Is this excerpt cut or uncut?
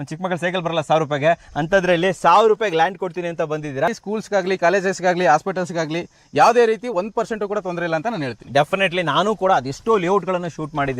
cut